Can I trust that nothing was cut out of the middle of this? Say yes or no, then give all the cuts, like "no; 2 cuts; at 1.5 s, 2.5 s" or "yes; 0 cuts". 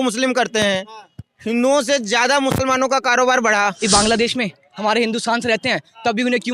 no; 1 cut; at 3.8 s